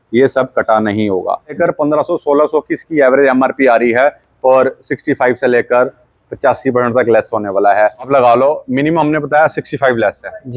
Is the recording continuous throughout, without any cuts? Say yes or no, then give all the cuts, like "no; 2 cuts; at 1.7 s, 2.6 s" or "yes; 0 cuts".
no; 2 cuts; at 1.6 s, 8.1 s